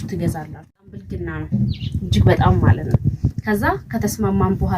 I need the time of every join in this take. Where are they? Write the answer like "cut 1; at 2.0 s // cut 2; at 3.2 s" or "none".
cut 1; at 1.1 s

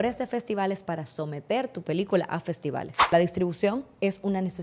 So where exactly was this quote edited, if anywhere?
cut 1; at 3.1 s

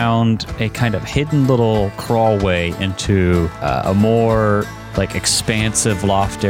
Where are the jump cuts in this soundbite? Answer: cut 1; at 2.0 s // cut 2; at 3.6 s // cut 3; at 4.8 s

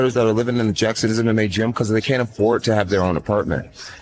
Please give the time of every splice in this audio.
cut 1; at 2.9 s

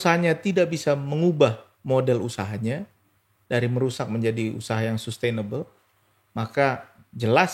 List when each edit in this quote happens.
none

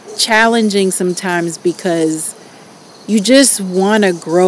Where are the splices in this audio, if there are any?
none

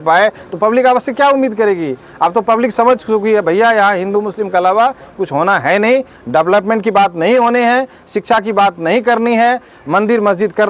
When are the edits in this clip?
none

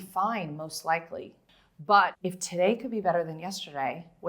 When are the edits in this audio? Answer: cut 1; at 1.4 s // cut 2; at 2.2 s

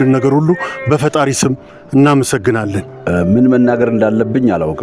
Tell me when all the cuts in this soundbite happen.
cut 1; at 2.9 s

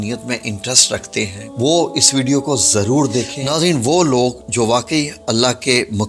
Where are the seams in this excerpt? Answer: cut 1; at 1.4 s // cut 2; at 3.4 s

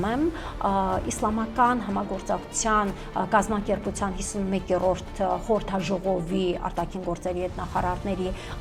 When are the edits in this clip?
none

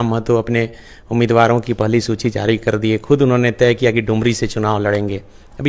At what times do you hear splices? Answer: none

